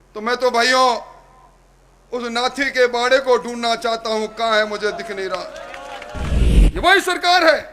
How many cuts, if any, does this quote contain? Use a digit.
1